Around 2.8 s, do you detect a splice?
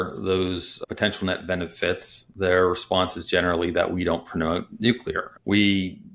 no; 0 cuts

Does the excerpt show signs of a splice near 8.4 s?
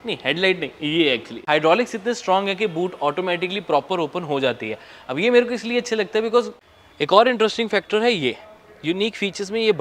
no; 2 cuts; at 1.3 s, 6.6 s

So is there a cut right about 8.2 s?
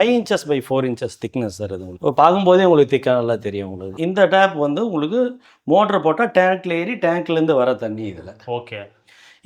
no; 2 cuts; at 1.9 s, 3.9 s

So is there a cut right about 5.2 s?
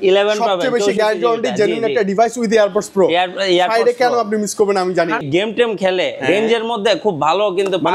yes; 1 cut; at 5.2 s

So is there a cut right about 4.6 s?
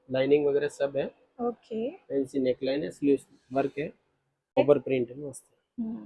yes; 1 cut; at 4.6 s

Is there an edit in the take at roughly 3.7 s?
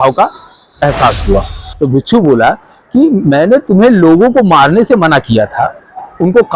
no; 1 cut; at 1.6 s

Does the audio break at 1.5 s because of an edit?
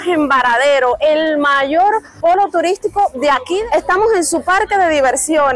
no; 1 cut; at 3.6 s

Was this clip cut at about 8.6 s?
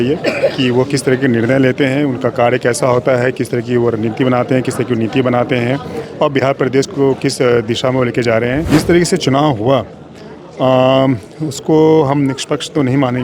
yes; 1 cut; at 8.6 s

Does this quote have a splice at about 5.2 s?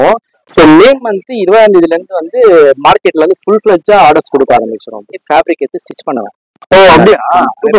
yes; 1 cut; at 5.2 s

